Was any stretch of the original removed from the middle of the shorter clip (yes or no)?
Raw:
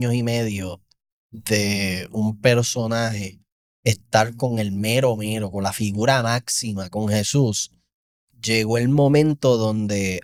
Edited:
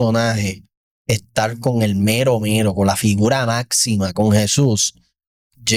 no